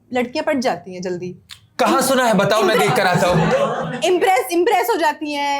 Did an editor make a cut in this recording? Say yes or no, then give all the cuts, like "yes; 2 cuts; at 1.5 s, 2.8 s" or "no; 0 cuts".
no; 0 cuts